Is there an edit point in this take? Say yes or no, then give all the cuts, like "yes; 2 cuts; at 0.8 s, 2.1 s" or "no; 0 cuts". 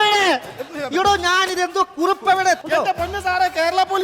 yes; 1 cut; at 2.6 s